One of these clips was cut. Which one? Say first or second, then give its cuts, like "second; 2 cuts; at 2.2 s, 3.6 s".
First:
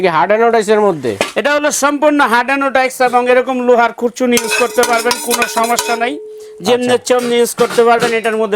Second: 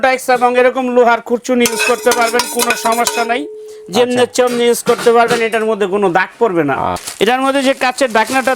second; 1 cut; at 7.0 s